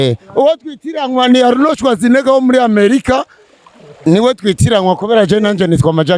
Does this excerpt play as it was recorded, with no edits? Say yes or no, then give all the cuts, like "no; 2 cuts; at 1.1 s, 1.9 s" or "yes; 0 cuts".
yes; 0 cuts